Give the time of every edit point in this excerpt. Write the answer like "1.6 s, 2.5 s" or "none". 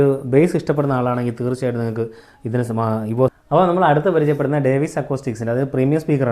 3.3 s